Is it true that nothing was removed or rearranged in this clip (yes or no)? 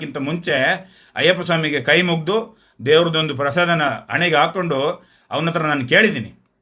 yes